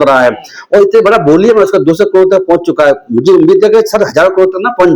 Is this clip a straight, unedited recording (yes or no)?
yes